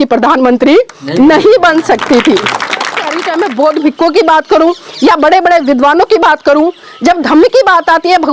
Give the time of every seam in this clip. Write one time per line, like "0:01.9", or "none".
0:03.2